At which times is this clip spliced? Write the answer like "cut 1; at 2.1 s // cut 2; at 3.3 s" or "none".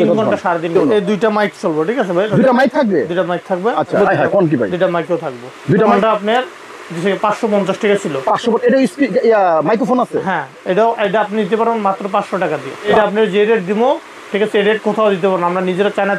cut 1; at 0.7 s // cut 2; at 4.0 s // cut 3; at 5.9 s // cut 4; at 12.9 s